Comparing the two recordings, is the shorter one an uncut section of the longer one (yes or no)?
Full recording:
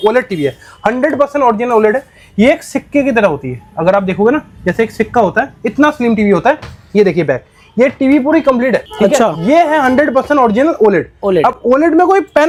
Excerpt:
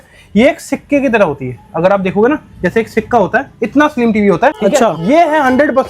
no